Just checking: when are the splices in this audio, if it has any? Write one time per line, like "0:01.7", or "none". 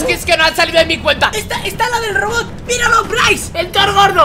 0:01.4